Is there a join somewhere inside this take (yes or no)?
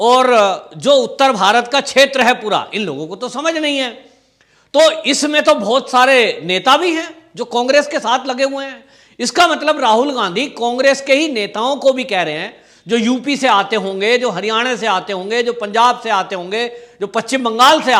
no